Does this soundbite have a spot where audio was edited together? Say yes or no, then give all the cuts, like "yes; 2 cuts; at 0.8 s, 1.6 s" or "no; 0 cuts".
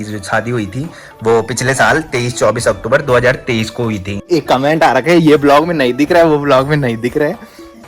yes; 1 cut; at 4.2 s